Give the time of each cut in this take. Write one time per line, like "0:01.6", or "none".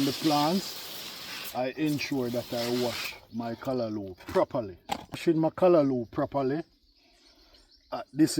0:05.2